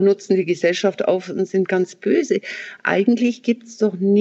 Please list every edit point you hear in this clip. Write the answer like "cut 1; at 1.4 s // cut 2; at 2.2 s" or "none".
none